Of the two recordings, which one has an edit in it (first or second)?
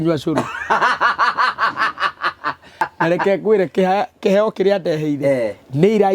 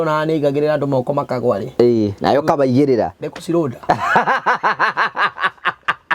first